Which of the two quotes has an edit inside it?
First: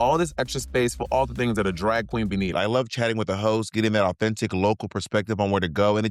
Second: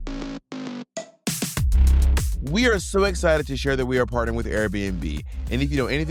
first; 1 cut; at 2.5 s

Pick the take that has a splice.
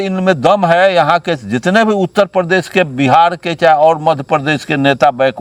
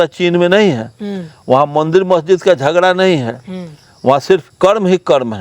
second; 1 cut; at 4.5 s

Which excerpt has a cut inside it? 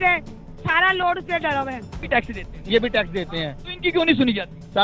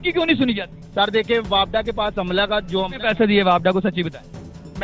first; 1 cut; at 2.0 s

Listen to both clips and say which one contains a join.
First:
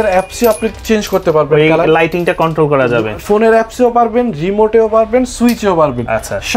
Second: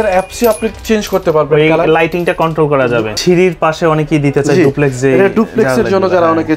second; 1 cut; at 3.2 s

